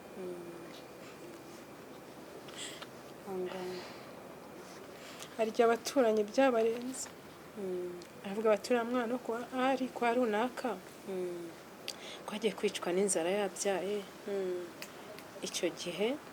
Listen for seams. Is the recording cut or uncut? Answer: uncut